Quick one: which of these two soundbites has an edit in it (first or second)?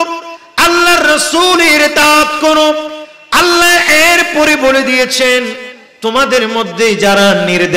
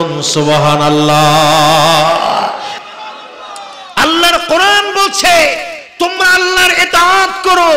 second